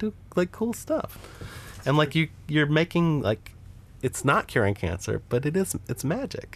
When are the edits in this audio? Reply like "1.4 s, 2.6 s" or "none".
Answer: 1.1 s

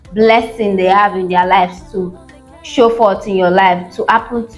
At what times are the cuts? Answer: none

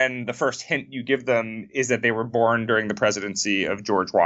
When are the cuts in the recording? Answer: none

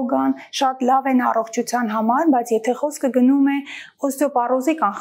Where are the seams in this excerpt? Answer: none

